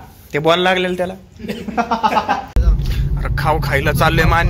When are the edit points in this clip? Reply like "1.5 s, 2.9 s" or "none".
2.6 s